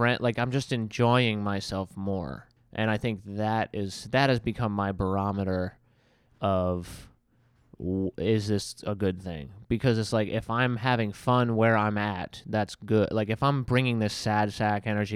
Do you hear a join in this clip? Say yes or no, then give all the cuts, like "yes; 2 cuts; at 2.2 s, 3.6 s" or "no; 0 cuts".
yes; 1 cut; at 2.5 s